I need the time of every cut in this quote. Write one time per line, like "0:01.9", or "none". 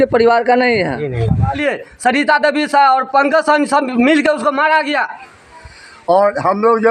0:01.6
0:05.3